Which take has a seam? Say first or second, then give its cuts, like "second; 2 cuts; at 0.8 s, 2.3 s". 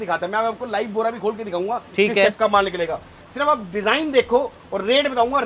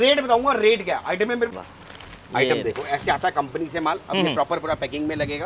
second; 1 cut; at 1.5 s